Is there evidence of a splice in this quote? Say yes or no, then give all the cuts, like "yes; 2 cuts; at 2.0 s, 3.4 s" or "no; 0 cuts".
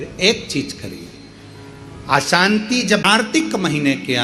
yes; 1 cut; at 3.2 s